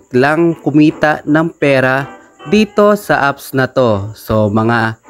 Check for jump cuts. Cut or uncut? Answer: uncut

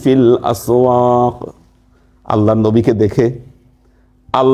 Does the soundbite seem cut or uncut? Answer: uncut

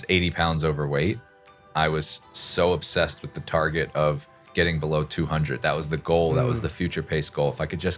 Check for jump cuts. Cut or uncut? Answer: uncut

